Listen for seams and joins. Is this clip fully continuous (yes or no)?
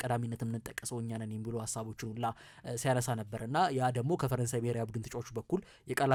yes